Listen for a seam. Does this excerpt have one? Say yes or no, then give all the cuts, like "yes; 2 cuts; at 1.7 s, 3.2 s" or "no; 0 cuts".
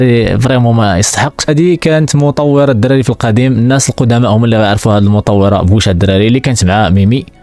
yes; 1 cut; at 1.5 s